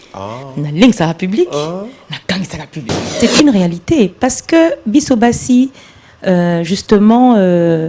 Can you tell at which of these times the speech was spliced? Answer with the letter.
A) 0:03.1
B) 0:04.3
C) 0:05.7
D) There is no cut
A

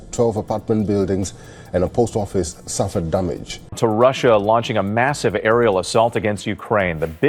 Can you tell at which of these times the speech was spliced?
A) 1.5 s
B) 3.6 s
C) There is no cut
B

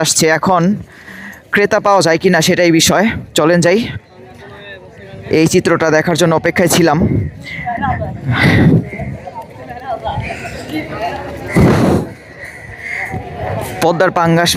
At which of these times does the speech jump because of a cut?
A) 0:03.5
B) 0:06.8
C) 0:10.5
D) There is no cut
D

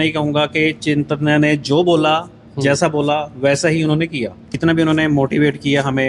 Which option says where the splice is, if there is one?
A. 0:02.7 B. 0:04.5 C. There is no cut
B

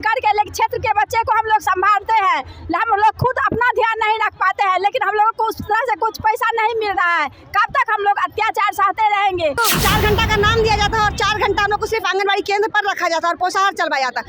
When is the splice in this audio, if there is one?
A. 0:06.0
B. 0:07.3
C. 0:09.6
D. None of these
C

